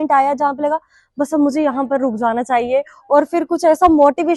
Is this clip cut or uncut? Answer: uncut